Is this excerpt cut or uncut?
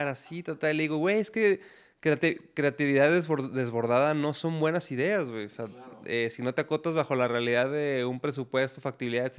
uncut